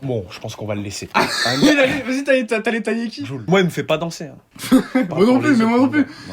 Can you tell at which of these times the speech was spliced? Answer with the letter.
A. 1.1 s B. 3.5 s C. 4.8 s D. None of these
B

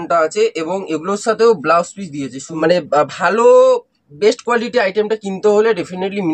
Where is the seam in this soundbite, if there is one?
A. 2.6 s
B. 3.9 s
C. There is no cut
A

